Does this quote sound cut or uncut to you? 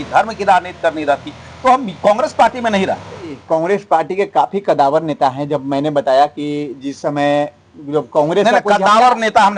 cut